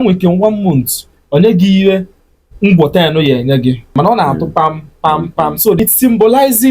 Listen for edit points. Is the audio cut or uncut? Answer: cut